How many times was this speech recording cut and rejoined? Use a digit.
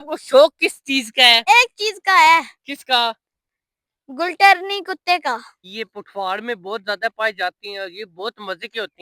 2